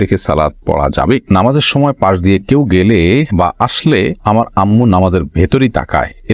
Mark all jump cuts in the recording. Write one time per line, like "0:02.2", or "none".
0:01.3